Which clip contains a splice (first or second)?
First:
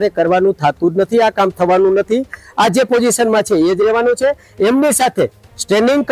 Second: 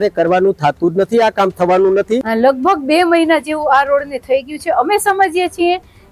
second